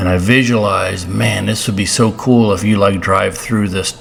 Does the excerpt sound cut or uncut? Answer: uncut